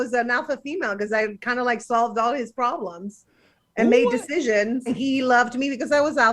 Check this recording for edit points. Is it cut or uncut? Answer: cut